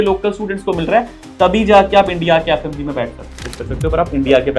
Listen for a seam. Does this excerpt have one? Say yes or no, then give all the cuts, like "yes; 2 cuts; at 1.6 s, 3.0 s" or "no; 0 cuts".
yes; 1 cut; at 3.4 s